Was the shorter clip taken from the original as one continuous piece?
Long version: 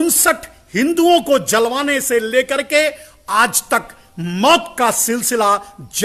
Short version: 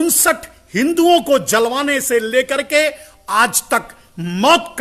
yes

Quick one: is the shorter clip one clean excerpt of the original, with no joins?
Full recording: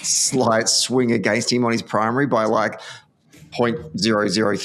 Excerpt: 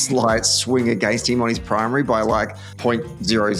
no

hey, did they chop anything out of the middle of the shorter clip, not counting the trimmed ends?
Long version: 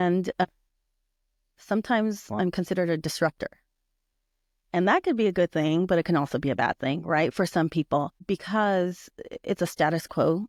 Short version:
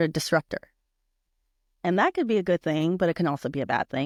no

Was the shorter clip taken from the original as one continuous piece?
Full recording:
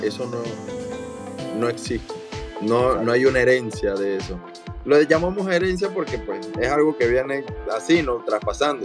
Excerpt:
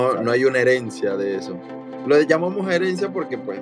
yes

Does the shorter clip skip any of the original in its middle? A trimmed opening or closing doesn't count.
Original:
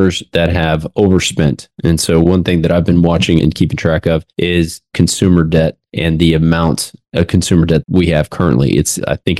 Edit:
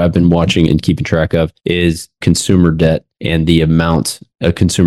no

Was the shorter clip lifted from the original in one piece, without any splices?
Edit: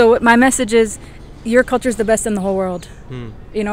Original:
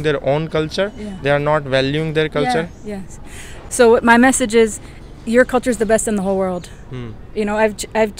yes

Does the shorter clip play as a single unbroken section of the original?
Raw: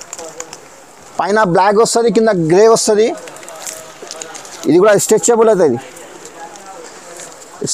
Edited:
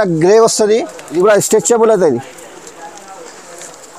no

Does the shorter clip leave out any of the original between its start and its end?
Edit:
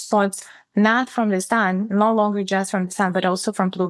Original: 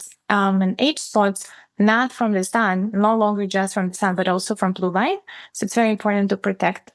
no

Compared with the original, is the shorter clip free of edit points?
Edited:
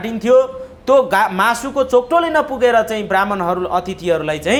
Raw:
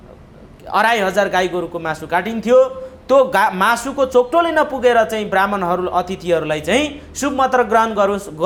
yes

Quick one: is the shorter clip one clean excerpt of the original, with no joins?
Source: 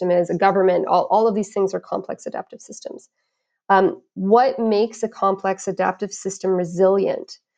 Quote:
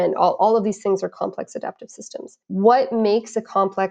no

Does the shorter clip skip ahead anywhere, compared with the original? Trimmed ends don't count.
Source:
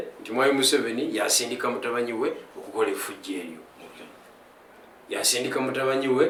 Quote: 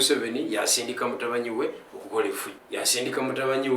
yes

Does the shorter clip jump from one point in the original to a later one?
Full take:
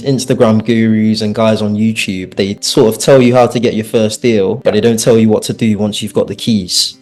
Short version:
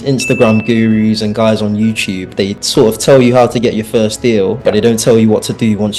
no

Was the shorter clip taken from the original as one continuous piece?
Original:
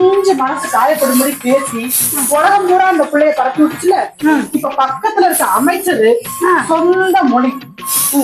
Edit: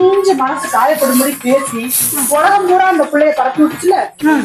yes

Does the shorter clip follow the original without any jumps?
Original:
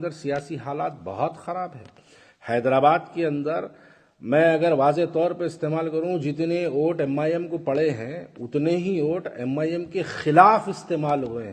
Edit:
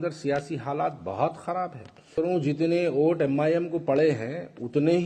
no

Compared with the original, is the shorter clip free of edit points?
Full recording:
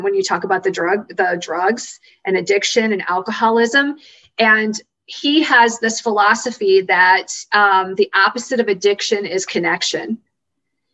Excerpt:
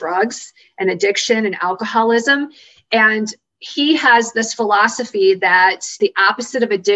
no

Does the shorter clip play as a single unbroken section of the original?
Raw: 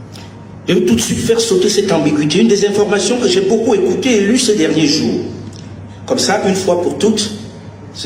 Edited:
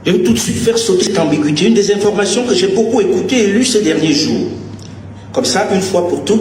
no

